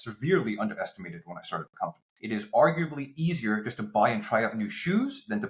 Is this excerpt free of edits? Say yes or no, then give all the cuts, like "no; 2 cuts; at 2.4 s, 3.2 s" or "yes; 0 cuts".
no; 1 cut; at 2.1 s